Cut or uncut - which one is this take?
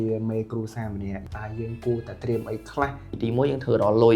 cut